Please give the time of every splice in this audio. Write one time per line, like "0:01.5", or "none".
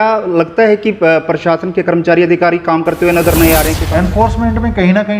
0:03.8